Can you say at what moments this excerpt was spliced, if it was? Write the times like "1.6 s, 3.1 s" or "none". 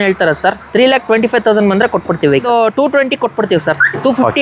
2.4 s